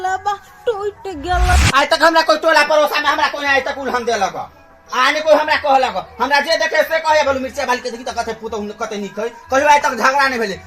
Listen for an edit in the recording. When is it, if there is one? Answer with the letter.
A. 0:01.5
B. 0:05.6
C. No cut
A